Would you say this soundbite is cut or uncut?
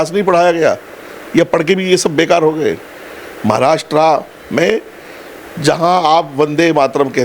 uncut